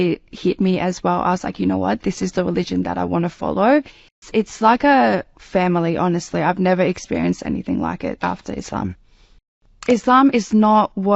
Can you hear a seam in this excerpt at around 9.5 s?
yes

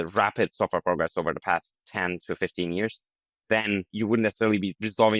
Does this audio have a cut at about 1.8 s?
yes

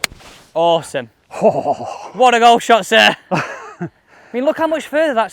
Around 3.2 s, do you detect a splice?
no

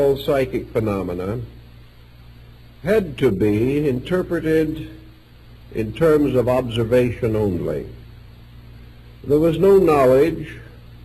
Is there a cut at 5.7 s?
yes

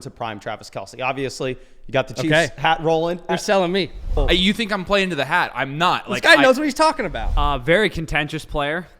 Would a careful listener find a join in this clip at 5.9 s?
no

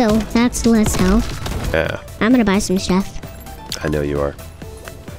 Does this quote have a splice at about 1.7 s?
yes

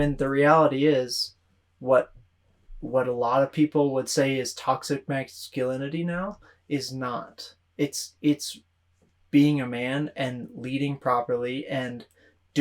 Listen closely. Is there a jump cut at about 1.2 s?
no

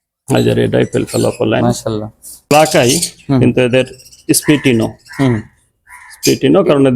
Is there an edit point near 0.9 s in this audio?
no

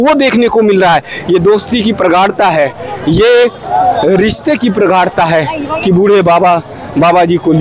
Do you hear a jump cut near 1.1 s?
yes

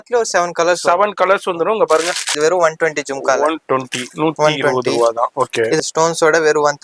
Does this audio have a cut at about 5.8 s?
yes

